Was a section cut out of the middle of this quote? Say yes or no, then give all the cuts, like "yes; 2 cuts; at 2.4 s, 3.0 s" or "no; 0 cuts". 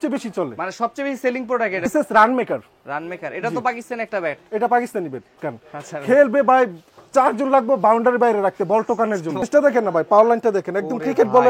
yes; 3 cuts; at 1.9 s, 5.4 s, 9.5 s